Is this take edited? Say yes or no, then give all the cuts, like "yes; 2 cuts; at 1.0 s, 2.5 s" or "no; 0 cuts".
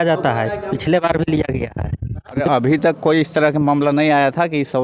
yes; 1 cut; at 2.4 s